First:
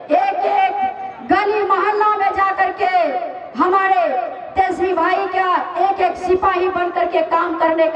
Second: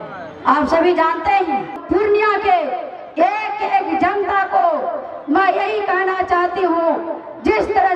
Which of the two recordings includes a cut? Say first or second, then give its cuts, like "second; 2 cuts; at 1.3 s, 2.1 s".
second; 1 cut; at 1.7 s